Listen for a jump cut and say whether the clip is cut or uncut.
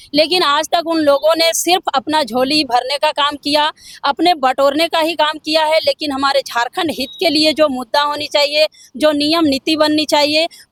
uncut